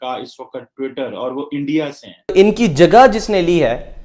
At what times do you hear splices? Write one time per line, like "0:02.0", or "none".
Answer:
0:02.3